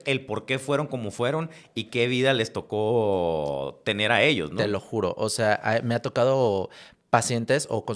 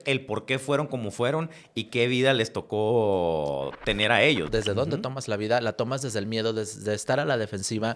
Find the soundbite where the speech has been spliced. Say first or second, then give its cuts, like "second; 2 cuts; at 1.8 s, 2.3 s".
second; 1 cut; at 4.5 s